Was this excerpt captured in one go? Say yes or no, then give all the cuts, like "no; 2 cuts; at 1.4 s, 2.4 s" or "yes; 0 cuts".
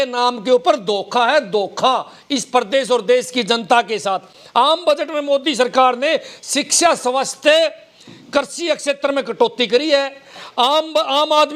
yes; 0 cuts